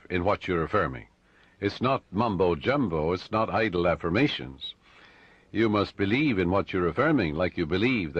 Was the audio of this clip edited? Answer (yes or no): no